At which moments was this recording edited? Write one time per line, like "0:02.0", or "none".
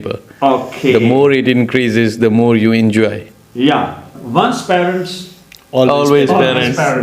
0:04.2